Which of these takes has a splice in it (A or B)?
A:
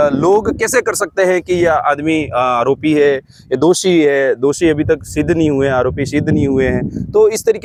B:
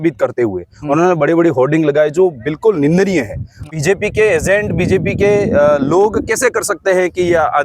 B